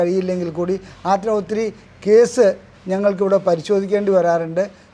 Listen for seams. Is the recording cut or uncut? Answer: uncut